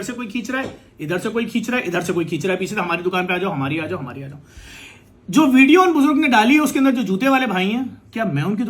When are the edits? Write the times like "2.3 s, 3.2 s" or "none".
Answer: none